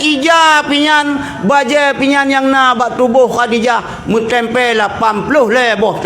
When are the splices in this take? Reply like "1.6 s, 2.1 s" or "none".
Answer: none